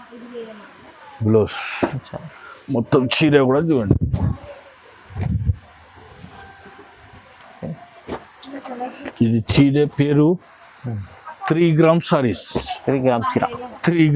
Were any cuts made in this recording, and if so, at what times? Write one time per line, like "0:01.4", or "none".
none